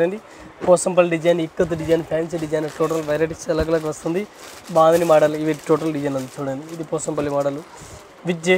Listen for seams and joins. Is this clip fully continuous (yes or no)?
yes